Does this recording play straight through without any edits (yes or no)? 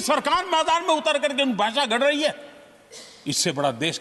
yes